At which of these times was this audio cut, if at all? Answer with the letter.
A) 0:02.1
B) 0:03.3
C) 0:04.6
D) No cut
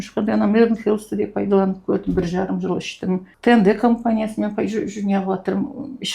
B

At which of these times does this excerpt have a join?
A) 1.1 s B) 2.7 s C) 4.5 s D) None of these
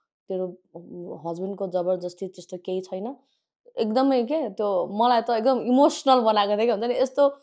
D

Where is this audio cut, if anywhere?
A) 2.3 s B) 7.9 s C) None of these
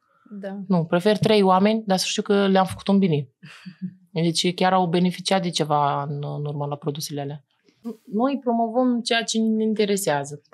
B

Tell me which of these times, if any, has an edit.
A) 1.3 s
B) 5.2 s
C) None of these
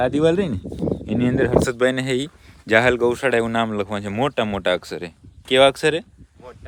C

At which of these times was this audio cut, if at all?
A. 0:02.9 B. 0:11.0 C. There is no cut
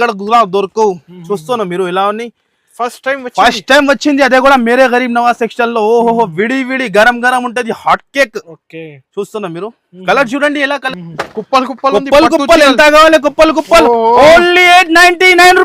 B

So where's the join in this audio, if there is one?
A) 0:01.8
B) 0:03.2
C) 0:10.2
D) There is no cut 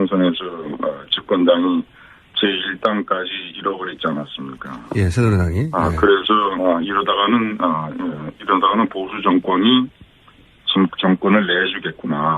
B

